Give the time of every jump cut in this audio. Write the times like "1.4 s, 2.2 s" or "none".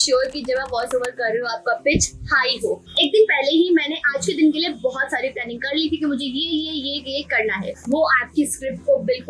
2.9 s, 7.8 s